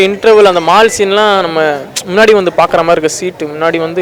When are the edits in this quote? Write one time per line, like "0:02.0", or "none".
none